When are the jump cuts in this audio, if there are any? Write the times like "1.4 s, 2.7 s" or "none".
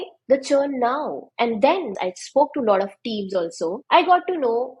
1.9 s, 3.8 s